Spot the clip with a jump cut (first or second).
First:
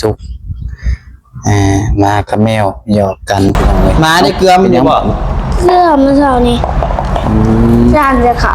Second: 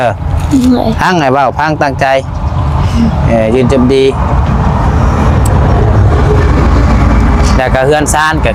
first